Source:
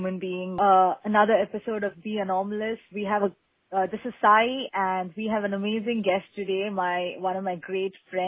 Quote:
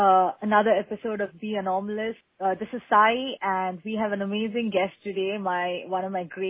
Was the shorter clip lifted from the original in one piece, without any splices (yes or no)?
no